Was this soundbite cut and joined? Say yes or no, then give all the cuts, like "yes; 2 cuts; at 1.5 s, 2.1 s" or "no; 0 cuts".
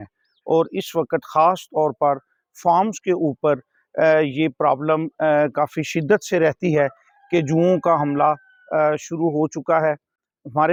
no; 0 cuts